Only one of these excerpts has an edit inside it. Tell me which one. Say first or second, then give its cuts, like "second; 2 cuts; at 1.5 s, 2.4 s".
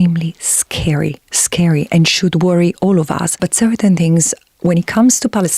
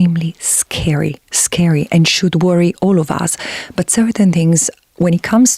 first; 1 cut; at 3.4 s